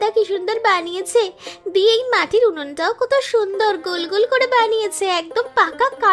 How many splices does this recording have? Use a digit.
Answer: 0